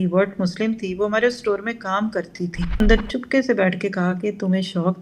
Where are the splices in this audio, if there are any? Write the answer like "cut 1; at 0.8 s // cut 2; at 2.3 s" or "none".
cut 1; at 2.8 s